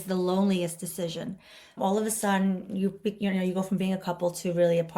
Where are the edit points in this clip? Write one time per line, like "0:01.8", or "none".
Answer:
0:01.7